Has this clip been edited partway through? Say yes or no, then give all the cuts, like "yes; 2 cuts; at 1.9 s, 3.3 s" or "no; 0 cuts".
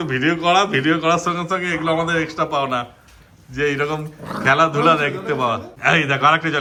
no; 0 cuts